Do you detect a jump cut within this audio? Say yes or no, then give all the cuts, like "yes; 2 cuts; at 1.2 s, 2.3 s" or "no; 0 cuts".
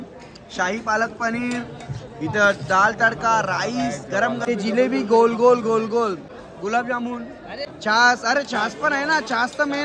yes; 3 cuts; at 4.4 s, 6.3 s, 7.7 s